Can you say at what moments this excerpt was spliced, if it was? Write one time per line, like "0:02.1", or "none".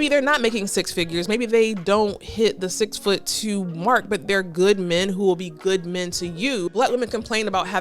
0:06.7